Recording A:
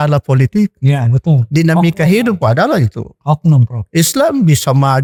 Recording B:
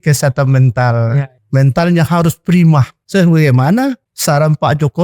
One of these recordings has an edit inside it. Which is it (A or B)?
B